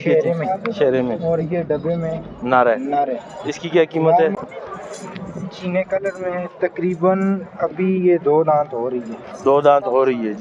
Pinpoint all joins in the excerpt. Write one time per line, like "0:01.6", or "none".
0:04.3